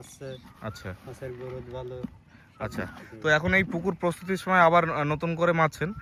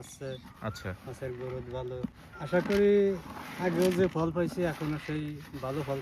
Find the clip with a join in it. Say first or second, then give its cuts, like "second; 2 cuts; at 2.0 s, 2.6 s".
second; 1 cut; at 2.3 s